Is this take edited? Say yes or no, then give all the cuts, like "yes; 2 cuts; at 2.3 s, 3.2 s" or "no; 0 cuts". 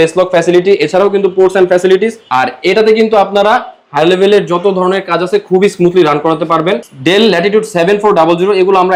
no; 0 cuts